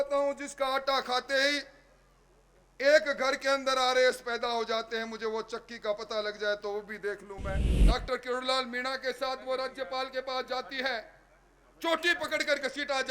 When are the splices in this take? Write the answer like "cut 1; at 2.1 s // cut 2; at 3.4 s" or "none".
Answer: cut 1; at 7.7 s